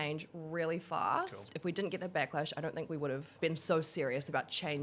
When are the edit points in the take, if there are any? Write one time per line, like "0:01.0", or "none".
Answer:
0:01.5
0:03.3

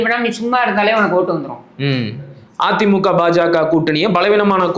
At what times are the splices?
0:02.4

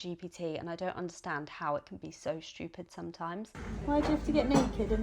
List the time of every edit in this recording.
0:03.6

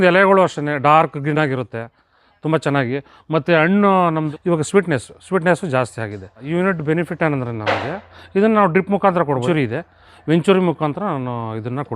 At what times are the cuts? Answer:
0:04.3
0:06.4
0:09.4

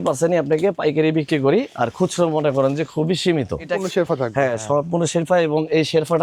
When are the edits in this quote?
none

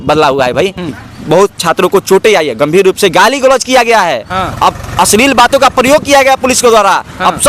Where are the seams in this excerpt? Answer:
0:01.0

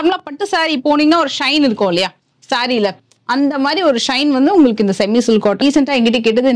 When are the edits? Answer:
0:05.6

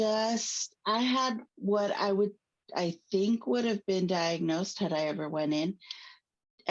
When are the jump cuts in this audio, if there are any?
0:01.5

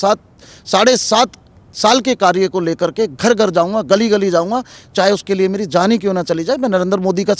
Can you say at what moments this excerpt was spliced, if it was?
none

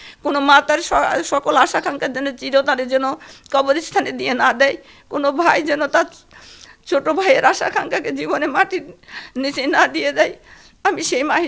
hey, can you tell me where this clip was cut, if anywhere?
none

